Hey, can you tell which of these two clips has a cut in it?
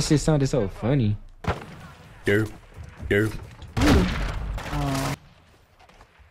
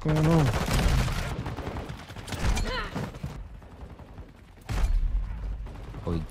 second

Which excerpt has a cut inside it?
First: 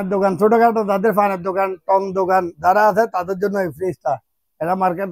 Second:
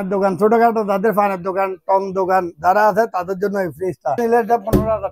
second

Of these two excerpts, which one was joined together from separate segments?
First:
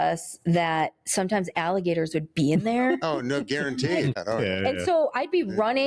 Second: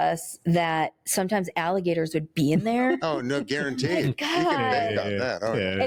first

